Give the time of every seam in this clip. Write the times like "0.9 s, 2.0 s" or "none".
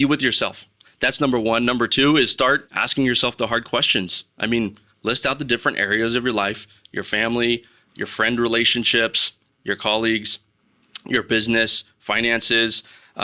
2.8 s